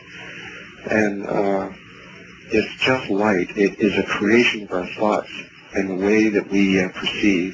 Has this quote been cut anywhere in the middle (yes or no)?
yes